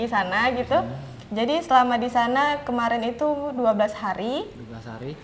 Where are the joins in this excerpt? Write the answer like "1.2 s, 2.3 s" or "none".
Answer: none